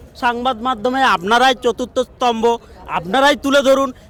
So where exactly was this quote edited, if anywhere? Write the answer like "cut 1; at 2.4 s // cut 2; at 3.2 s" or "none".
none